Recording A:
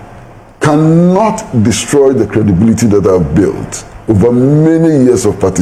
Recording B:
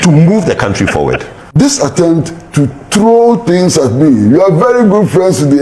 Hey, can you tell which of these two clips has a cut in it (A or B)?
B